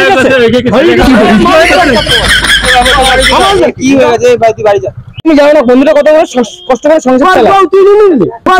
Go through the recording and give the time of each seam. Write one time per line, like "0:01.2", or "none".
0:05.2